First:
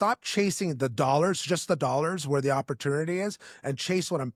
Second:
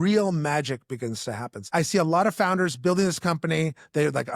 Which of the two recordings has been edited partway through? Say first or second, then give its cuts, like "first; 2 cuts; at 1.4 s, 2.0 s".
second; 1 cut; at 1.6 s